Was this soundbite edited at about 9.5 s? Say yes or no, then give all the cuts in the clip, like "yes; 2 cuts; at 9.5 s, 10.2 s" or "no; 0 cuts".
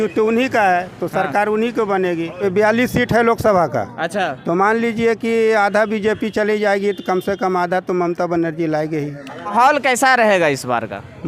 yes; 2 cuts; at 2.4 s, 9.5 s